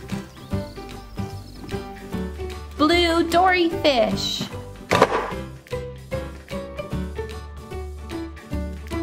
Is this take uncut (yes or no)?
no